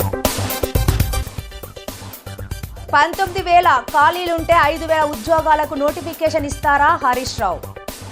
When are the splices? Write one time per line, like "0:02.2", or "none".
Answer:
0:01.2
0:02.6